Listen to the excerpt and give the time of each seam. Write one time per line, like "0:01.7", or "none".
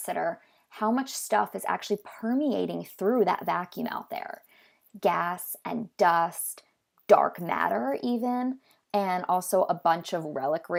none